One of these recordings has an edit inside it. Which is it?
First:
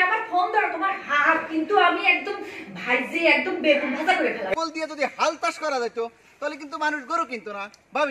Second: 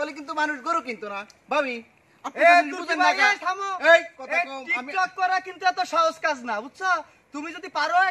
first; 1 cut; at 4.5 s

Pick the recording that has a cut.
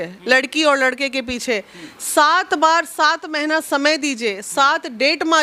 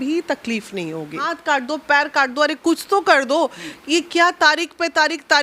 second; 1 cut; at 1.2 s

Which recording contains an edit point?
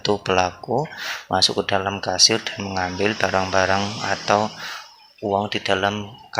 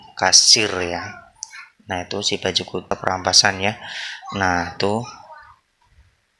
second; 1 cut; at 2.9 s

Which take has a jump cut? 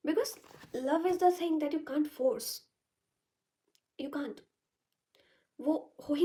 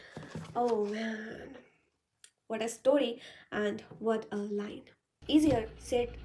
second; 1 cut; at 5.3 s

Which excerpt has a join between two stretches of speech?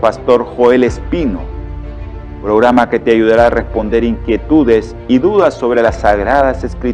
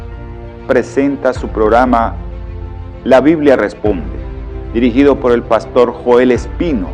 second; 1 cut; at 0.9 s

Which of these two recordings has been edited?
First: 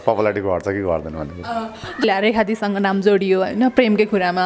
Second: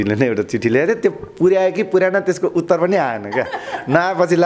first; 1 cut; at 2.0 s

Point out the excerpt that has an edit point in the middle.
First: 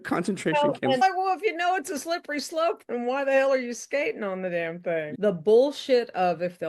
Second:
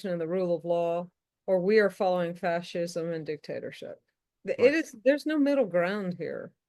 first; 2 cuts; at 1.0 s, 5.1 s

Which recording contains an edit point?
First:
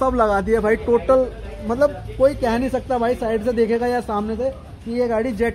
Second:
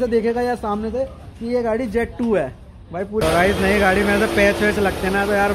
second; 1 cut; at 3.2 s

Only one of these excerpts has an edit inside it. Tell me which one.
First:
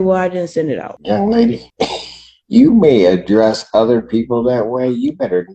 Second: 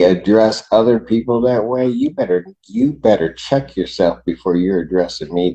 first; 2 cuts; at 0.9 s, 1.7 s

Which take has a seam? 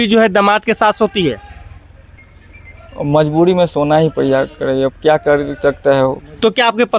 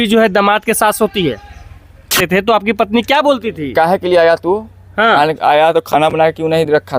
second; 1 cut; at 2.2 s

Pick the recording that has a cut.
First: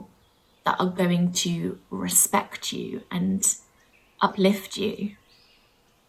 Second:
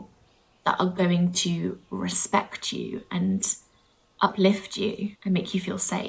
second; 1 cut; at 5.2 s

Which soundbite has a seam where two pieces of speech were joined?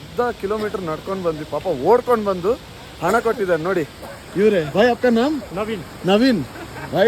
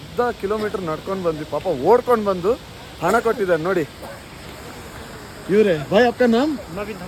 first; 2 cuts; at 4.7 s, 5.5 s

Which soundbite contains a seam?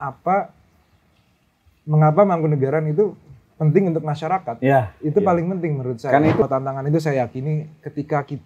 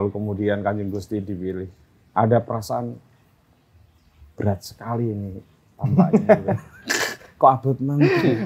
first; 1 cut; at 6.4 s

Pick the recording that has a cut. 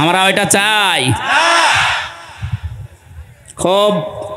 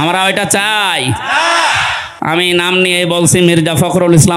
second; 1 cut; at 2.1 s

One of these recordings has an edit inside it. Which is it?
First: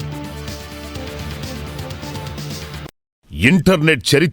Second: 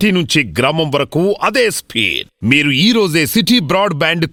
first; 1 cut; at 3.1 s

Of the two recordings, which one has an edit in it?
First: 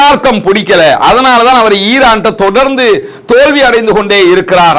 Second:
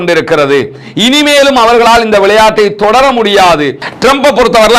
second; 1 cut; at 3.9 s

